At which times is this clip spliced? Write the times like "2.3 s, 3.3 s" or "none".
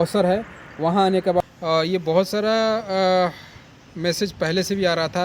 1.4 s

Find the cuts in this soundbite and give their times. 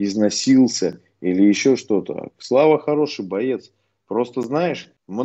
none

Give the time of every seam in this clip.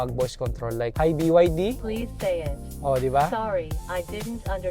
0.9 s, 1.8 s

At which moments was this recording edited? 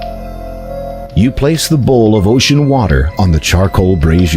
1.1 s

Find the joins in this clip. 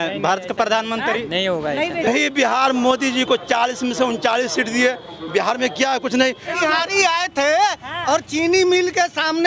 2.1 s, 6.5 s

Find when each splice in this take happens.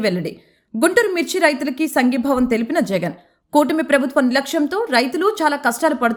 none

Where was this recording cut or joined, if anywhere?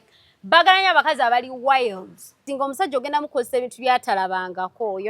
2.5 s

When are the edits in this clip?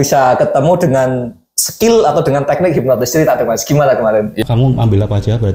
4.4 s

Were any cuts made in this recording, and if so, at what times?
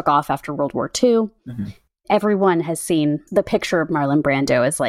3.2 s

